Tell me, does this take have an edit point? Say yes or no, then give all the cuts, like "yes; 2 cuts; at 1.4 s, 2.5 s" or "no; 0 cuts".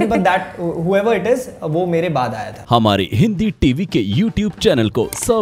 yes; 1 cut; at 2.5 s